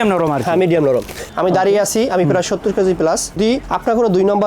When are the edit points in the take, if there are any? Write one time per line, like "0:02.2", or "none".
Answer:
0:01.2
0:03.4

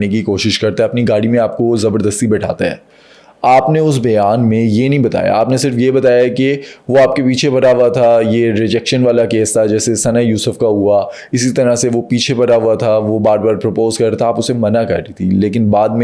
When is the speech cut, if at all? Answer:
none

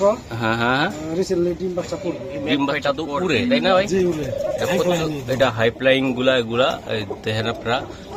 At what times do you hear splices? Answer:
0:02.8

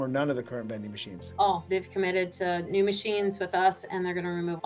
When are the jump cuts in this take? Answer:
0:01.6

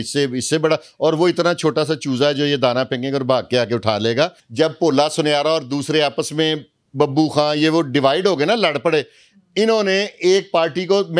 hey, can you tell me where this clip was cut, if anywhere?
0:04.4

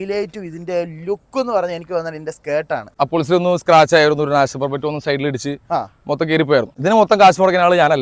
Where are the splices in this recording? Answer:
0:02.9
0:06.7

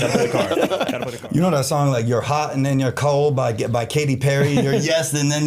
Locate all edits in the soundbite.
0:01.1

